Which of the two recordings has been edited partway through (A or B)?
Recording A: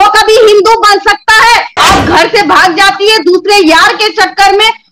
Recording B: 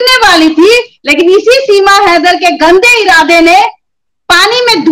A